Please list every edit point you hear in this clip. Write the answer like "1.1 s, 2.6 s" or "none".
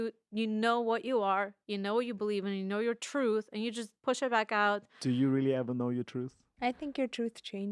3.9 s, 6.4 s